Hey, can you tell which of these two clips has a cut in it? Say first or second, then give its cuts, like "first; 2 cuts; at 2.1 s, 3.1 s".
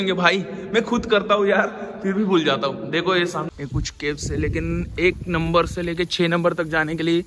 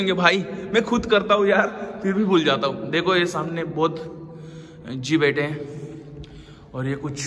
first; 1 cut; at 3.5 s